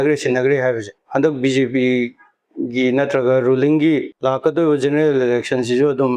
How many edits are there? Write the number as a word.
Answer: two